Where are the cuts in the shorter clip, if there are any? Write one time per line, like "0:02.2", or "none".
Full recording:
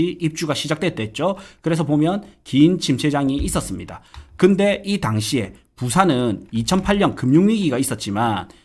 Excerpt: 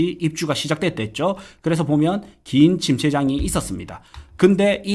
none